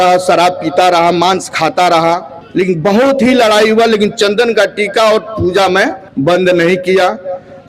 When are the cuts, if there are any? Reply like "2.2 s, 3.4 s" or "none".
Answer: 2.4 s, 6.0 s